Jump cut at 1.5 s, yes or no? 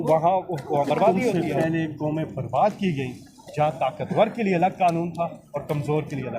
yes